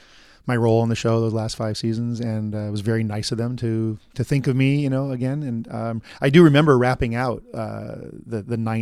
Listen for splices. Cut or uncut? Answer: uncut